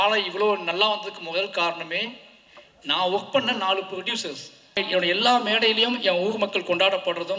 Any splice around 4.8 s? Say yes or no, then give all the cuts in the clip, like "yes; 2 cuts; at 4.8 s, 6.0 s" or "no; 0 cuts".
yes; 1 cut; at 4.8 s